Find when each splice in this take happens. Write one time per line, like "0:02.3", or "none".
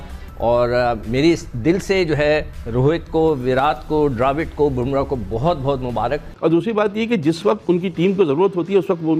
0:06.3